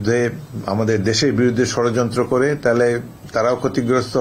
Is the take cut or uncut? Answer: uncut